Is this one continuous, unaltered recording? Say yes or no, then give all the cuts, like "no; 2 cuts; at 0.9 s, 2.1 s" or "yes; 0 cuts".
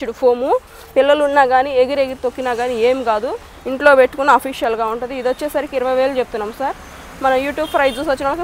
yes; 0 cuts